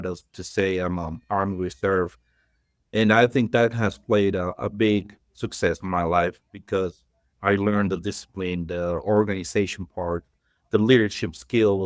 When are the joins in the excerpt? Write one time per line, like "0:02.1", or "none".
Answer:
none